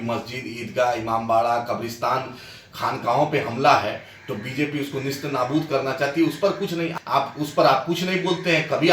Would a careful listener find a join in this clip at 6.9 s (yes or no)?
yes